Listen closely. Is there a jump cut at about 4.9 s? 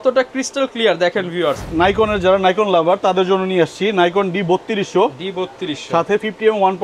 no; 1 cut; at 1.7 s

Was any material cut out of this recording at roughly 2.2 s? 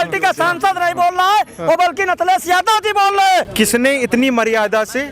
no; 1 cut; at 3.5 s

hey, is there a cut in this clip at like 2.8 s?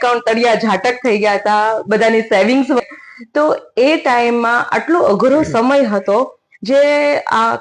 yes; 1 cut; at 2.8 s

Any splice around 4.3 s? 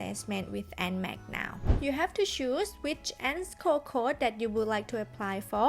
no; 1 cut; at 1.7 s

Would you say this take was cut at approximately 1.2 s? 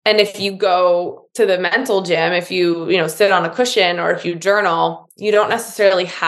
yes; 1 cut; at 1.2 s

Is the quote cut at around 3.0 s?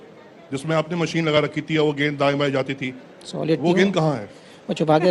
no; 0 cuts

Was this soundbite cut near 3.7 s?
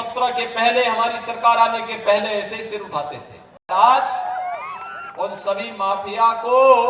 yes; 1 cut; at 3.7 s

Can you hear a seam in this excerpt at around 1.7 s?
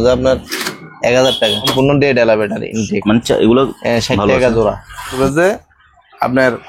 yes; 2 cuts; at 1.7 s, 5.2 s

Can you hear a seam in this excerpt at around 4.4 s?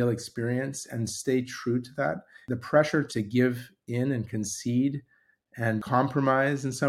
no; 3 cuts; at 2.3 s, 3.1 s, 5.8 s

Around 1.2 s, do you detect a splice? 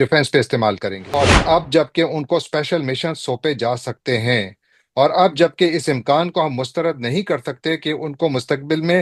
yes; 1 cut; at 1.2 s

